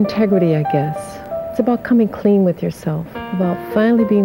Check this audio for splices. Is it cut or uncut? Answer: cut